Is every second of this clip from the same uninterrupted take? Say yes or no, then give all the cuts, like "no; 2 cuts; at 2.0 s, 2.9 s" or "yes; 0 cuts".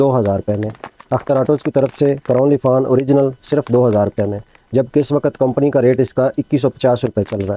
yes; 0 cuts